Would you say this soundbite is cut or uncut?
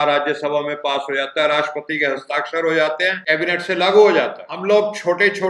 cut